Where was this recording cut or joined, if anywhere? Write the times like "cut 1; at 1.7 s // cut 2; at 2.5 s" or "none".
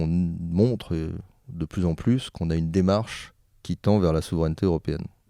none

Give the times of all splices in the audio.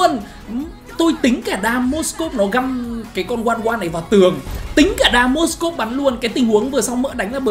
none

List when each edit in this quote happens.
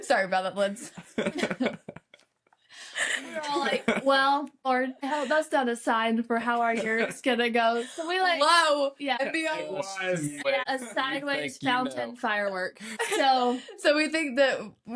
cut 1; at 4.6 s // cut 2; at 9.2 s // cut 3; at 10.5 s // cut 4; at 12.9 s

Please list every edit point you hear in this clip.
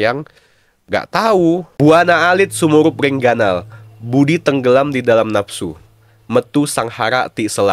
cut 1; at 1.7 s

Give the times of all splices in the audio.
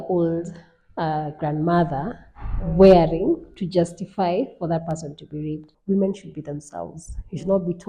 cut 1; at 5.7 s

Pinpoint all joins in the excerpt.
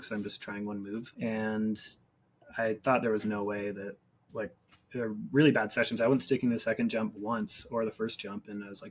cut 1; at 1.1 s // cut 2; at 4.1 s

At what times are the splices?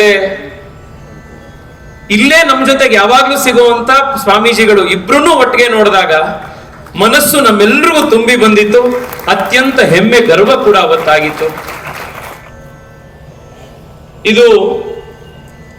cut 1; at 12.4 s

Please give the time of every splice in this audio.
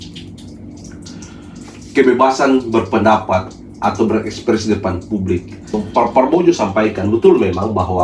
cut 1; at 5.8 s

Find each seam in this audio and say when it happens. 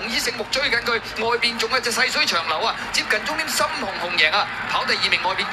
none

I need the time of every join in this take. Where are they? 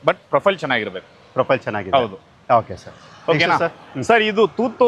none

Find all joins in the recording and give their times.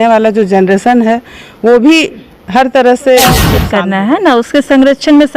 cut 1; at 3.6 s

